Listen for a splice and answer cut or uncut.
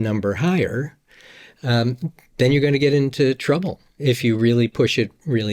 uncut